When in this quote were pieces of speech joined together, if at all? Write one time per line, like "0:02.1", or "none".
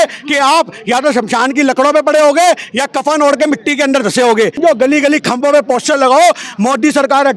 0:04.6

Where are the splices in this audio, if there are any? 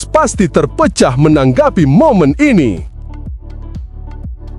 0:03.4

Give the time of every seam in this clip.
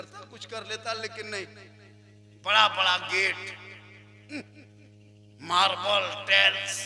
none

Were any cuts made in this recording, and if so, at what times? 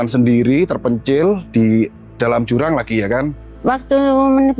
0:03.5

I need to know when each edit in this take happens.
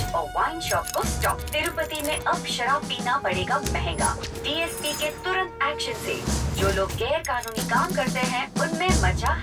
none

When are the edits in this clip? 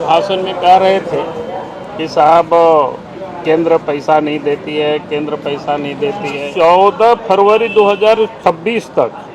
0:06.5
0:08.4

